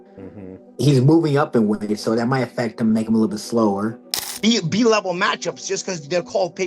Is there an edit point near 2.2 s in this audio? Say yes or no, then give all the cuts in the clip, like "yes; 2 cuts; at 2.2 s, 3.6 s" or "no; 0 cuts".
no; 1 cut; at 4.0 s